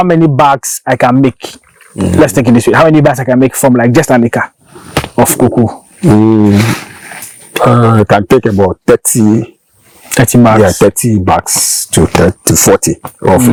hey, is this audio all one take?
yes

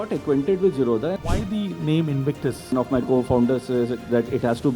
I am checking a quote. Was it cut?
yes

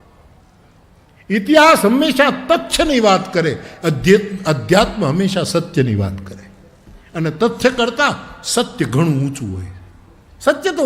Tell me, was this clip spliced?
no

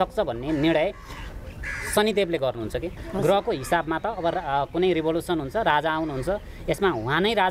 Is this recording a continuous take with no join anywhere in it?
no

